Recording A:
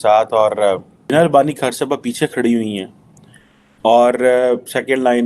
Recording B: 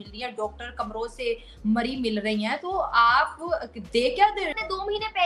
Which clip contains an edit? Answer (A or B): A